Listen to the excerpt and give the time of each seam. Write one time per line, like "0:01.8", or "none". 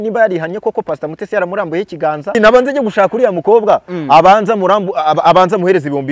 0:02.4